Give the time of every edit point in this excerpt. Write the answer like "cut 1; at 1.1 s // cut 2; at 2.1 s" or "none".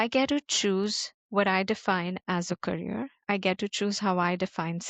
none